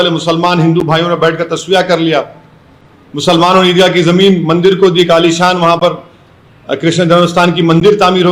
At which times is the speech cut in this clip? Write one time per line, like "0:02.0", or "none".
none